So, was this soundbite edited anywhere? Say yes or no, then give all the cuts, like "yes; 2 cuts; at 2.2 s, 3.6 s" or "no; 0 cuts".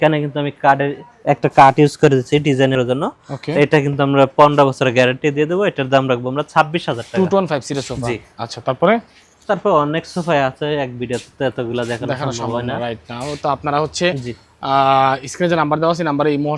no; 0 cuts